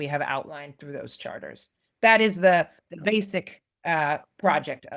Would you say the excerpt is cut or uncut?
uncut